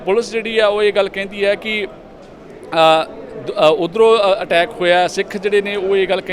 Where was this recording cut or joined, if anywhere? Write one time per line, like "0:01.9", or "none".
none

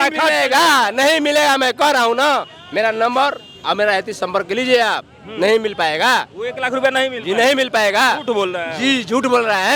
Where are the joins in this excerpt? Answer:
none

